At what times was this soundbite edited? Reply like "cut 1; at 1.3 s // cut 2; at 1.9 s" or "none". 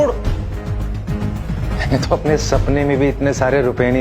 cut 1; at 1.6 s